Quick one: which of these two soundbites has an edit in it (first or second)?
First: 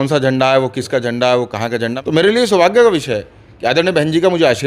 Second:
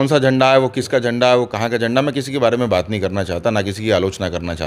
first